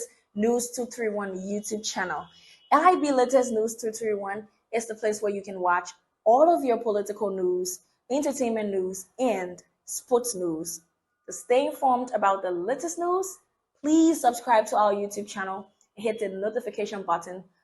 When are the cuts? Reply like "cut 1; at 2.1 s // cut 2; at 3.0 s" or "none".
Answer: none